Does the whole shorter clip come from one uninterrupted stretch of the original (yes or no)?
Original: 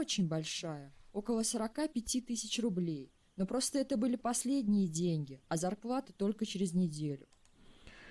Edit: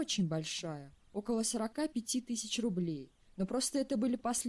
yes